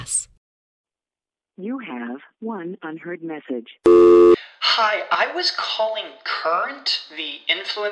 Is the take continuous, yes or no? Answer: no